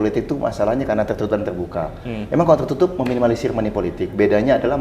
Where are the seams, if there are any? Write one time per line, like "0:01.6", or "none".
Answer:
none

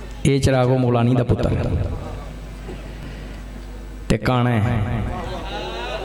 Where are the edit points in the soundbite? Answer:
none

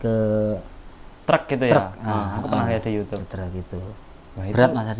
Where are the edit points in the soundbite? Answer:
none

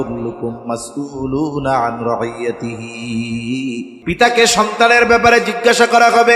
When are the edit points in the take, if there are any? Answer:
0:03.9

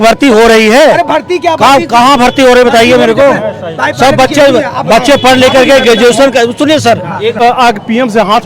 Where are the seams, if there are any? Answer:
0:07.4

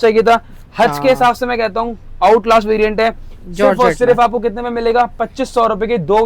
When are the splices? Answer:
none

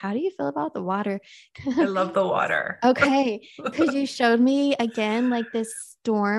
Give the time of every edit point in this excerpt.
0:01.4

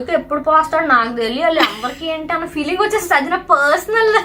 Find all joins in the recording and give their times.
none

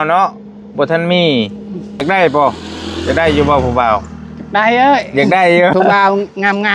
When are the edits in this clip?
0:02.0
0:05.7

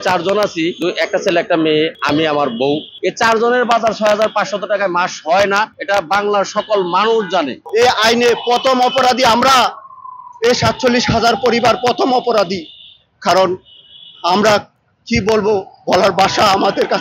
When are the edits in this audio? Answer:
0:00.8
0:02.0
0:02.9
0:05.8
0:07.6

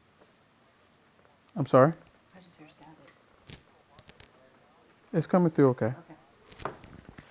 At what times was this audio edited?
none

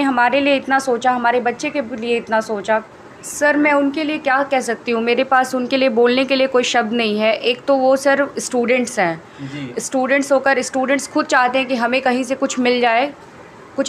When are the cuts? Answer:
0:03.4

